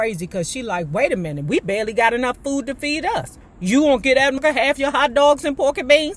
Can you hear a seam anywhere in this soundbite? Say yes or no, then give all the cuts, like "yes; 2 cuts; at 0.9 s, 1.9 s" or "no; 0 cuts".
yes; 1 cut; at 4.4 s